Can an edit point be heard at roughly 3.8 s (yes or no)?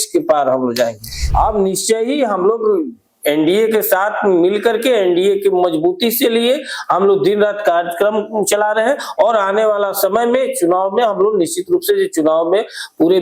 no